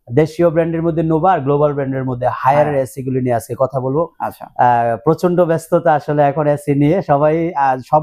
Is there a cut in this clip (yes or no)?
no